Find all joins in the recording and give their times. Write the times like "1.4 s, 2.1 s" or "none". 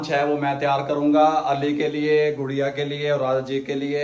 none